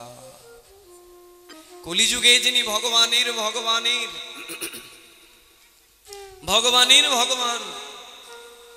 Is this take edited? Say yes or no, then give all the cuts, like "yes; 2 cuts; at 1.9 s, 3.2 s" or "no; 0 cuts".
yes; 1 cut; at 1.5 s